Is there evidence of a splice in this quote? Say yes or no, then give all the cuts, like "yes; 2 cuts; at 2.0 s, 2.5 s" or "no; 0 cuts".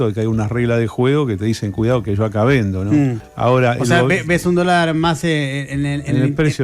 yes; 1 cut; at 3.2 s